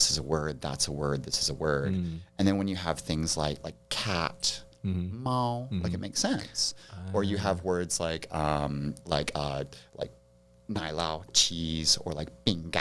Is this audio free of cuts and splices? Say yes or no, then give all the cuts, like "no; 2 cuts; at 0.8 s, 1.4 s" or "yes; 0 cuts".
yes; 0 cuts